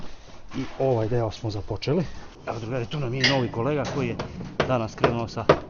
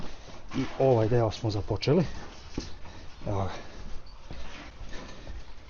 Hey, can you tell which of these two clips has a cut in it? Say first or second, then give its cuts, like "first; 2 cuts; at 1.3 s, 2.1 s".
first; 1 cut; at 2.3 s